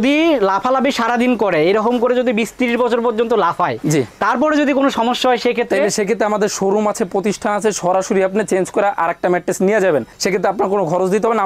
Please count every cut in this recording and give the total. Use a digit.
0